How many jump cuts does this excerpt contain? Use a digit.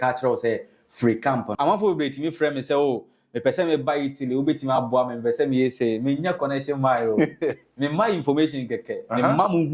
1